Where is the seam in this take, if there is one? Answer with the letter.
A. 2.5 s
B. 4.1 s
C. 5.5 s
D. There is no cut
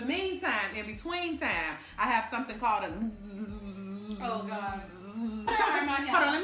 C